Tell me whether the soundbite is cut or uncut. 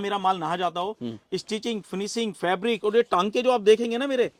uncut